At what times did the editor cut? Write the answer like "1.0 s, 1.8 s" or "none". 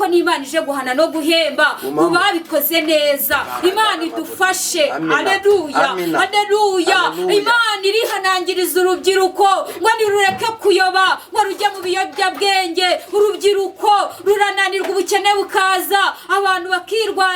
none

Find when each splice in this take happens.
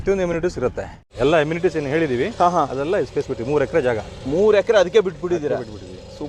1.0 s

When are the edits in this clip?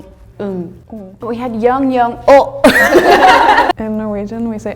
1.1 s, 3.8 s

